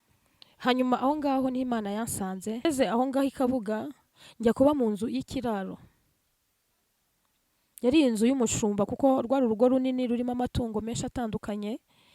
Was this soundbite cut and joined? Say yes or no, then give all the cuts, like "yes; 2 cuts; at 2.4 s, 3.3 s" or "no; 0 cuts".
yes; 1 cut; at 2.6 s